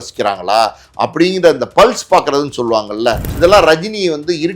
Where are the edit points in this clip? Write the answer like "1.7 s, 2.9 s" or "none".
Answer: 3.3 s